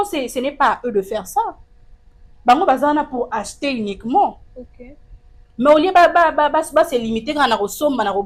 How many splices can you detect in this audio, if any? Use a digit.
0